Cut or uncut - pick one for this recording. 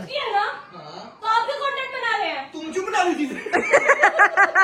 uncut